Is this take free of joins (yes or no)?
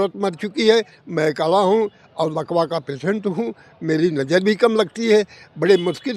yes